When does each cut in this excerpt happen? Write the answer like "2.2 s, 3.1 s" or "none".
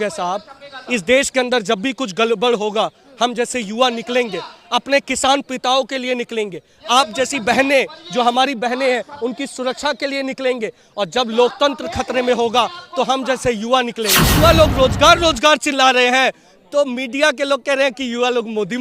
14.3 s